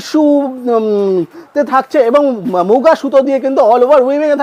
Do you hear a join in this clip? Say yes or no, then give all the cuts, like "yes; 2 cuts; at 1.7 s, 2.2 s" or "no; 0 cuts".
no; 0 cuts